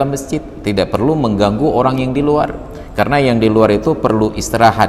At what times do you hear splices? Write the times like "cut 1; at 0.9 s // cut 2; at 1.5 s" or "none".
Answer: none